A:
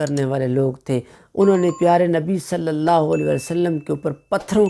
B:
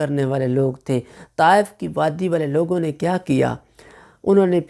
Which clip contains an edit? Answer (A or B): A